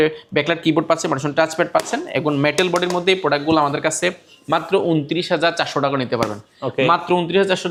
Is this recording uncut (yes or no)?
yes